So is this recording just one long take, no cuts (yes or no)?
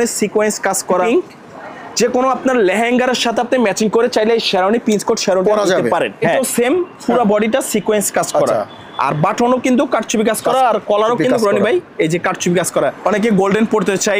no